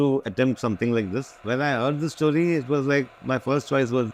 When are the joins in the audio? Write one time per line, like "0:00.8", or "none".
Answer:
0:01.4